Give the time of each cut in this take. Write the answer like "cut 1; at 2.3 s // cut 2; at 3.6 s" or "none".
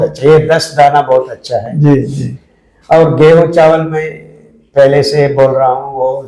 none